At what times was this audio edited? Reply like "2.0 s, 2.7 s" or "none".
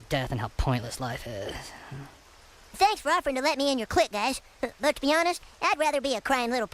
2.8 s